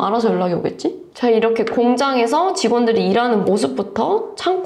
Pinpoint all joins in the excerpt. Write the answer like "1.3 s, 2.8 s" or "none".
1.1 s